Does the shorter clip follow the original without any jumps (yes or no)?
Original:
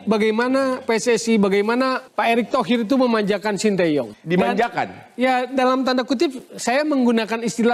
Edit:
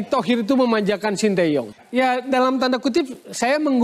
no